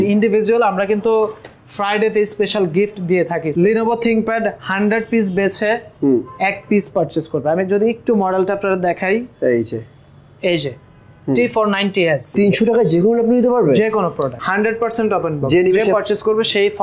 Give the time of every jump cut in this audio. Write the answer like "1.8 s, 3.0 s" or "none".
3.5 s, 12.3 s, 14.4 s